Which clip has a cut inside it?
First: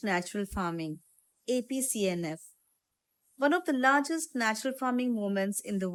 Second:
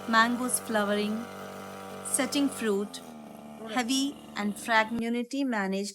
second; 1 cut; at 5.0 s

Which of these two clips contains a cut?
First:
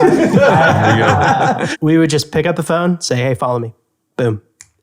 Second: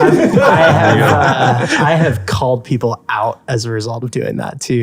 first; 1 cut; at 1.7 s

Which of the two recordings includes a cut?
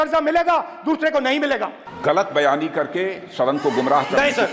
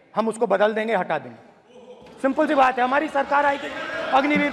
first; 1 cut; at 1.8 s

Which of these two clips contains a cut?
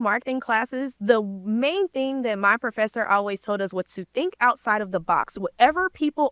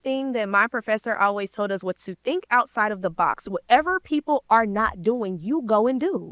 first; 1 cut; at 0.9 s

